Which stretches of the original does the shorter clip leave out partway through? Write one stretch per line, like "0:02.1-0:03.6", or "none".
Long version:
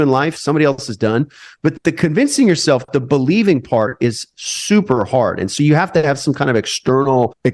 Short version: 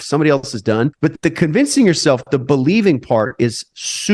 0:01.3-0:01.6